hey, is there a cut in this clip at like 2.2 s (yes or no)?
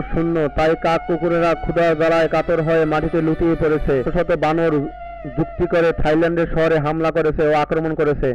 no